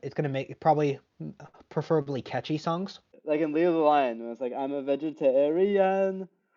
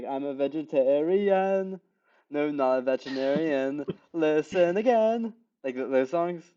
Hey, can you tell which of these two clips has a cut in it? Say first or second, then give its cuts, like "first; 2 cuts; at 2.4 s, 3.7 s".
first; 1 cut; at 3.1 s